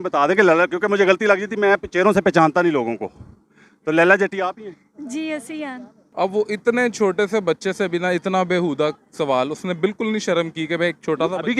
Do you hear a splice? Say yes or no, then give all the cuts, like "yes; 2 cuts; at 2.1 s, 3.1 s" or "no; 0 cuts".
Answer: yes; 1 cut; at 6.0 s